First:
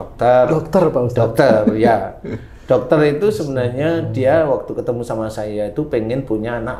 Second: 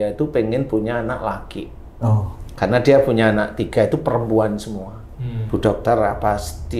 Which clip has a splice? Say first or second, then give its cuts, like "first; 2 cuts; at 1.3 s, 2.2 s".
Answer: second; 1 cut; at 5.0 s